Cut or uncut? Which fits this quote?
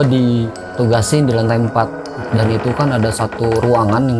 uncut